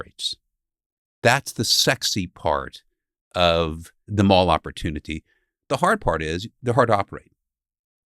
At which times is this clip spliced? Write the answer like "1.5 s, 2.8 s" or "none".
4.0 s